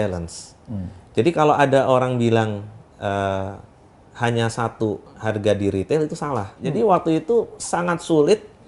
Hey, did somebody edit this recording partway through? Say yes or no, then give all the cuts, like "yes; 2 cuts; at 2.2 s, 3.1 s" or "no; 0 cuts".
yes; 1 cut; at 6.6 s